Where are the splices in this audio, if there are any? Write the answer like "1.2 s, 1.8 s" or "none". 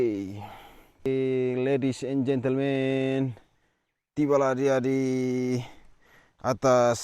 1.1 s